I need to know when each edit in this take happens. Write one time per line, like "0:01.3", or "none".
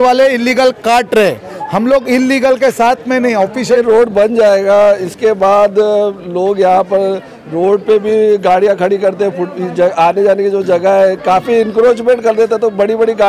0:03.7